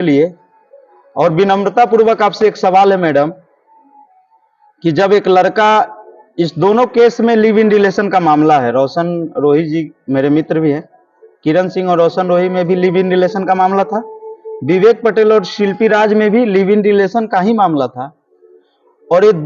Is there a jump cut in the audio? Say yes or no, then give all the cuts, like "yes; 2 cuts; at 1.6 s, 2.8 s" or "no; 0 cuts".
no; 0 cuts